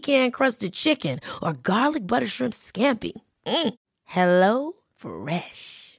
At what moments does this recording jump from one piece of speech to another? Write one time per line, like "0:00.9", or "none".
none